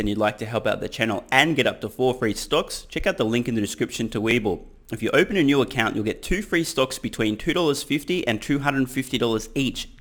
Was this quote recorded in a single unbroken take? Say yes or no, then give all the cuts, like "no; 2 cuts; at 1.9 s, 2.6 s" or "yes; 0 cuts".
yes; 0 cuts